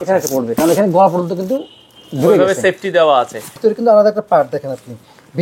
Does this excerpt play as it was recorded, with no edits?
no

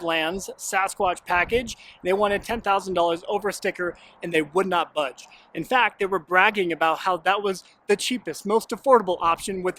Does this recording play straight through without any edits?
yes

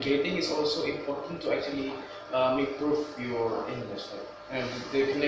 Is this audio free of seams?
yes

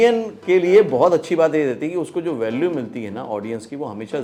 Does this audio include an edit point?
no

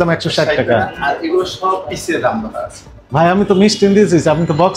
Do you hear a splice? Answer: no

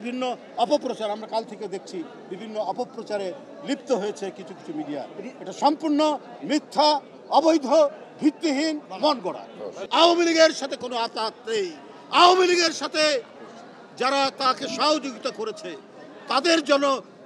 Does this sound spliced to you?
yes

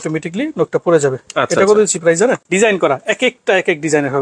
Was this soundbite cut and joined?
yes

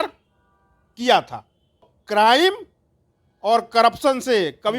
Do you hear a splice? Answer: yes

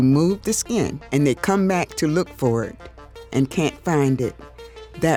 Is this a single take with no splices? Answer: yes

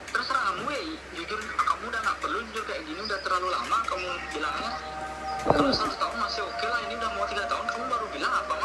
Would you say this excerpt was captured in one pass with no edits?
yes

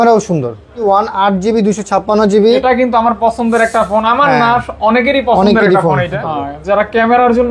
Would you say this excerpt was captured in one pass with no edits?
no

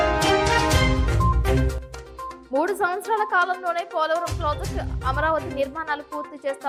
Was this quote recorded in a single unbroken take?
yes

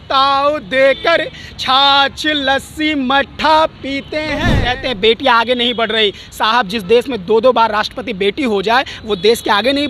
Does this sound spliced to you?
yes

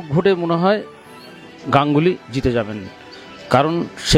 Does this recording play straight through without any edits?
yes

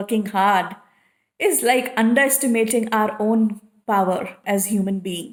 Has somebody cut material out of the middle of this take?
no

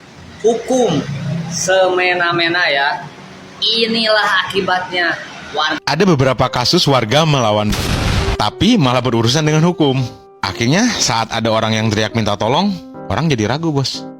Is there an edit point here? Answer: yes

